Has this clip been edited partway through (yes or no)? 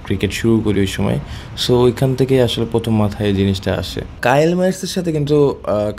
yes